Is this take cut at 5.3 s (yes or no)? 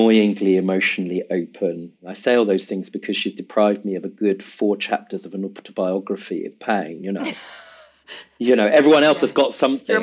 no